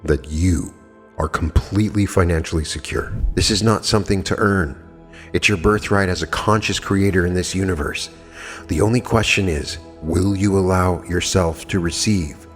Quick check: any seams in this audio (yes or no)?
yes